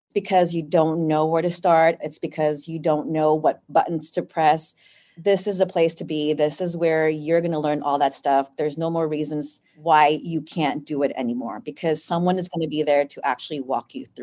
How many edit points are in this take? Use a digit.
0